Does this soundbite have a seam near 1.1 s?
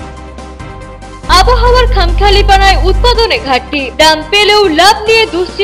yes; 1 cut; at 1.1 s

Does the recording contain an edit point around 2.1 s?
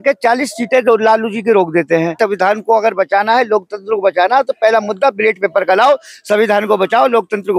yes; 1 cut; at 2.1 s

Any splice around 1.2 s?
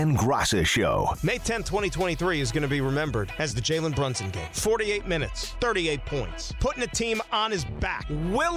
yes; 1 cut; at 1.2 s

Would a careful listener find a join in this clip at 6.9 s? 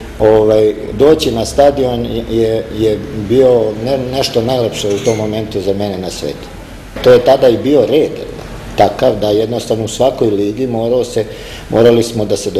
yes; 1 cut; at 6.9 s

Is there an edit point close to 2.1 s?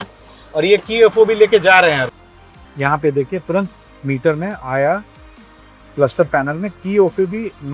yes; 1 cut; at 2.1 s

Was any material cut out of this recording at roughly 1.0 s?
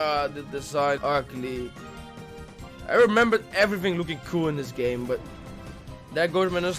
yes; 1 cut; at 1.0 s

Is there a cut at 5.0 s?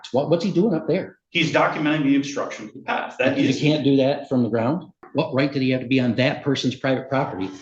yes; 1 cut; at 5.0 s

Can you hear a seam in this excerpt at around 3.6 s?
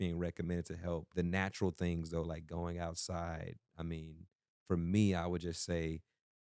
no; 1 cut; at 1.1 s

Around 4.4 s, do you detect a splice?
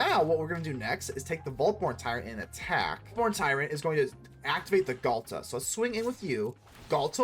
no; 1 cut; at 3.1 s

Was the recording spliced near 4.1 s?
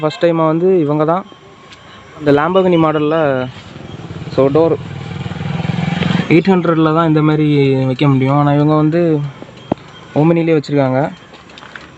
no; 2 cuts; at 2.2 s, 6.2 s

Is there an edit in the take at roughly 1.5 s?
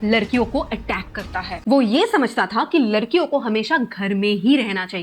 yes; 1 cut; at 1.5 s

